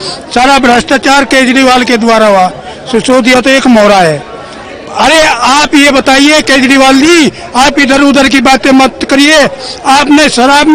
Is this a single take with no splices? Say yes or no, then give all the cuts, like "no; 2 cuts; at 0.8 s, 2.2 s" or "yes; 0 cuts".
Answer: yes; 0 cuts